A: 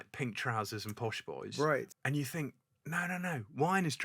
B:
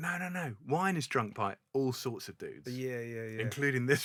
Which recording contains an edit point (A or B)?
A